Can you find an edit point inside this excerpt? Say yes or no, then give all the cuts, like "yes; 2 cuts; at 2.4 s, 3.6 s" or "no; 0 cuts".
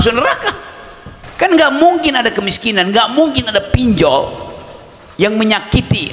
yes; 1 cut; at 1.5 s